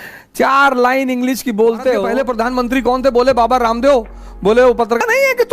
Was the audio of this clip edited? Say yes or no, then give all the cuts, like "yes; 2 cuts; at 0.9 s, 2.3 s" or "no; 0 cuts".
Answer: yes; 2 cuts; at 2.1 s, 4.6 s